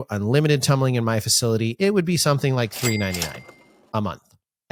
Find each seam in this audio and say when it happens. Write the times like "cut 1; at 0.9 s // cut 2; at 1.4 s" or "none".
none